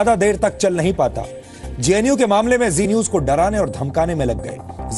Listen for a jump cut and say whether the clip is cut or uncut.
uncut